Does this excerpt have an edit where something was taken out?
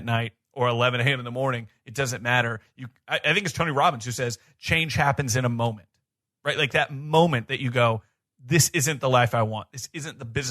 no; 0 cuts

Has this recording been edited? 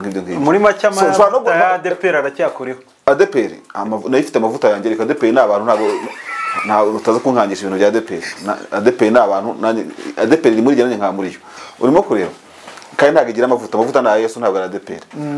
no; 0 cuts

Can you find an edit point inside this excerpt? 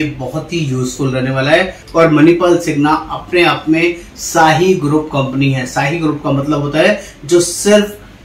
yes; 1 cut; at 1.8 s

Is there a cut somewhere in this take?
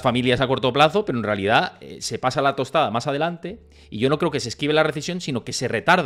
no; 0 cuts

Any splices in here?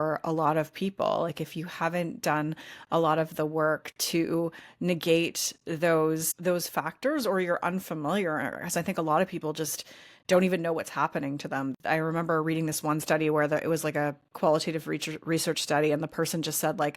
yes; 1 cut; at 11.7 s

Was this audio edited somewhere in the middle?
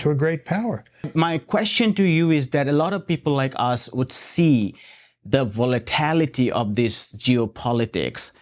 yes; 1 cut; at 1.1 s

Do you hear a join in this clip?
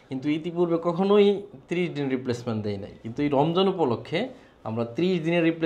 no; 0 cuts

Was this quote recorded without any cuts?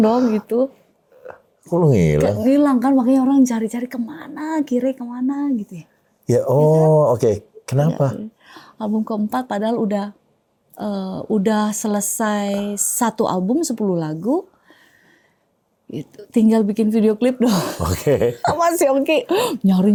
yes; 0 cuts

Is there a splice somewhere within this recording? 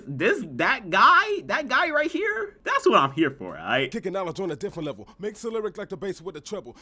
yes; 1 cut; at 4.0 s

